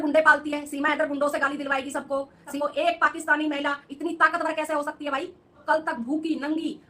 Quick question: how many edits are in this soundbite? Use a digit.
2